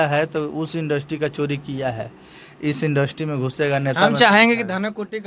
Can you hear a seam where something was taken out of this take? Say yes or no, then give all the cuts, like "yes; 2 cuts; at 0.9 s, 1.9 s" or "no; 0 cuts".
no; 0 cuts